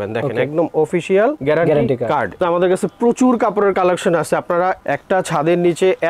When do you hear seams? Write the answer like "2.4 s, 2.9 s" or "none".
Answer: 2.4 s